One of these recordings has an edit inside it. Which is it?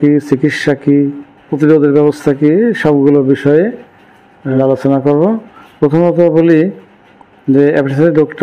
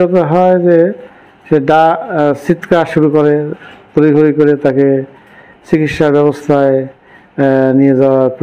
first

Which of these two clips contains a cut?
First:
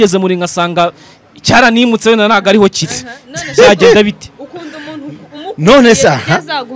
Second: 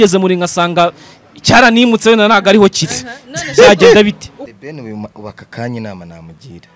second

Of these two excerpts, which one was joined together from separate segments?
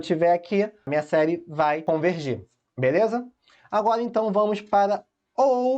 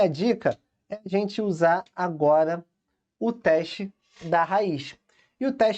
first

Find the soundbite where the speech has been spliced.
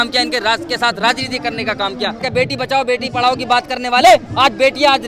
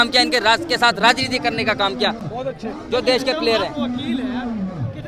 first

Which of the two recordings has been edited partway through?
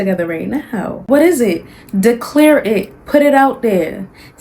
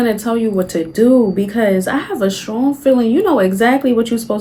first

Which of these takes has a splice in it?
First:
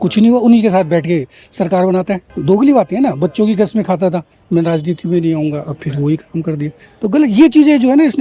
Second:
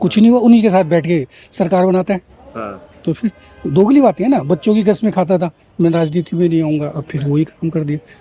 first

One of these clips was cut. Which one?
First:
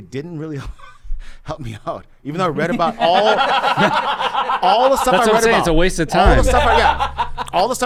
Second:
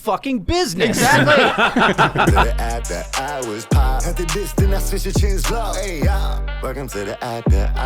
second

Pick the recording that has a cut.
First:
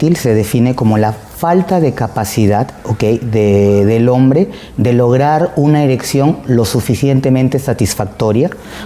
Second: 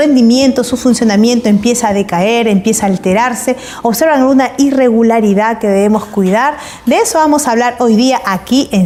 first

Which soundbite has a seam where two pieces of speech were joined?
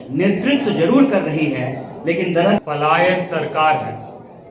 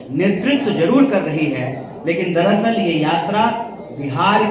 first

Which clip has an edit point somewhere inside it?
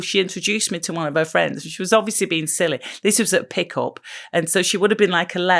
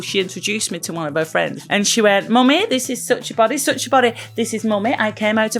second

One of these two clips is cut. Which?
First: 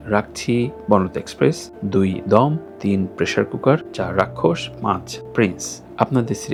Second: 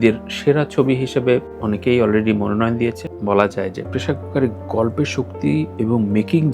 second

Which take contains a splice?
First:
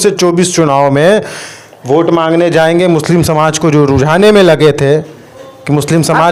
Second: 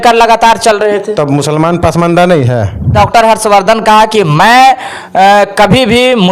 second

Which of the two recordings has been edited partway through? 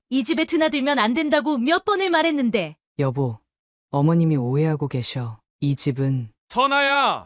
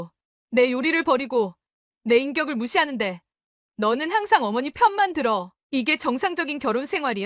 first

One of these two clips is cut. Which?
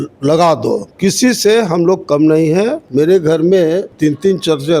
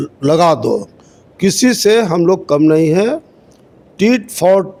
first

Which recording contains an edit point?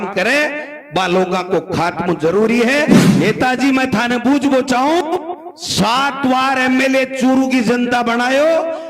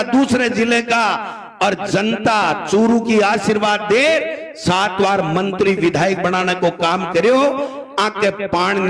first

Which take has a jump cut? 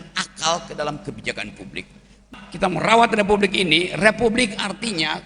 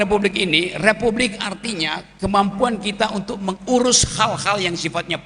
first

